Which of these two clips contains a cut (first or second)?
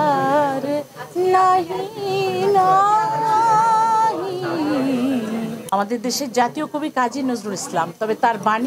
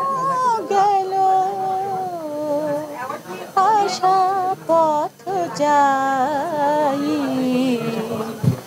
first